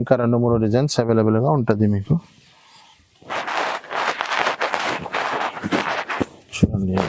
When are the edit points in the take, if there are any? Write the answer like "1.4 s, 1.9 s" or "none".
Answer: none